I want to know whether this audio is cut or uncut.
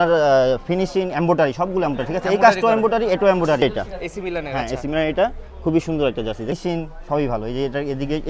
cut